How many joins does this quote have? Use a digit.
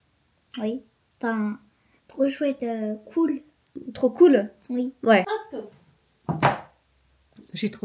1